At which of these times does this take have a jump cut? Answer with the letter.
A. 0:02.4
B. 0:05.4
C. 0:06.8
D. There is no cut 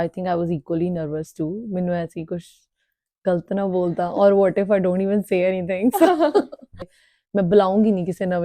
C